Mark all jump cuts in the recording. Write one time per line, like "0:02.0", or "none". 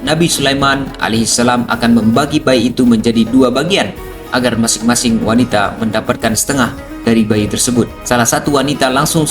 0:08.0